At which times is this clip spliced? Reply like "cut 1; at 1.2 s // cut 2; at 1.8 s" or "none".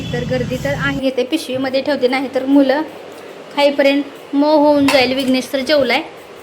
cut 1; at 1.0 s